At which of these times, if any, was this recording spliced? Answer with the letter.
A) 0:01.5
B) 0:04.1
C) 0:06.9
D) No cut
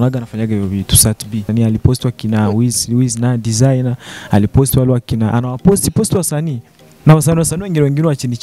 A